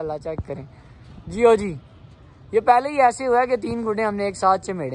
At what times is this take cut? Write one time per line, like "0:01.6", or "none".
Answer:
none

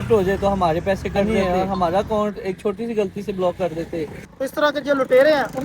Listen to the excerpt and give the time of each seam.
0:01.2
0:04.2

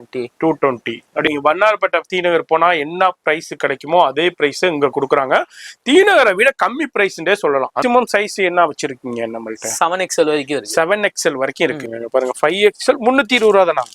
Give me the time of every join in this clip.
0:01.3
0:07.8
0:11.9

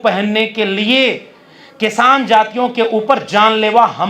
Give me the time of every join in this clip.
none

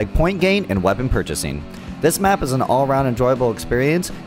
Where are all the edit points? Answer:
0:01.1

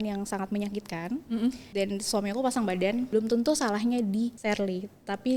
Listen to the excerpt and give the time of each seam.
0:01.6
0:03.1
0:04.4

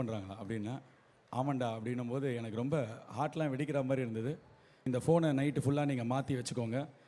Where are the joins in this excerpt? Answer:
0:04.8

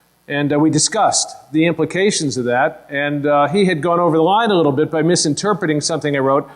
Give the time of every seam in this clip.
0:00.9

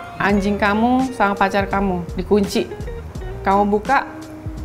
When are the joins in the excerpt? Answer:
0:02.1

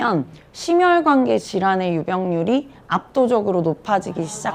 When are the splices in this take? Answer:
none

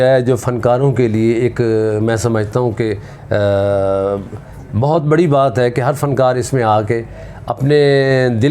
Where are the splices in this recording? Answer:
none

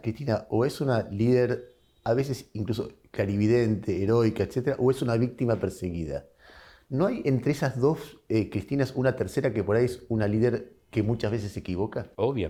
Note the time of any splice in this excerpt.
none

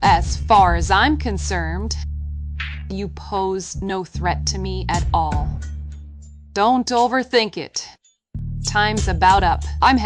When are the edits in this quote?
none

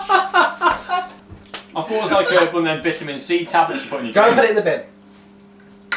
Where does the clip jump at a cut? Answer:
0:01.0

